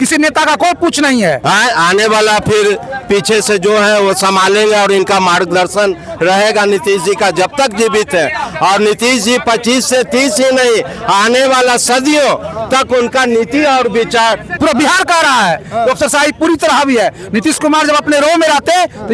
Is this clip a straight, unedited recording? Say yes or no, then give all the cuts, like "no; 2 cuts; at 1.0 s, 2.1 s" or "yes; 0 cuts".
no; 2 cuts; at 1.4 s, 14.5 s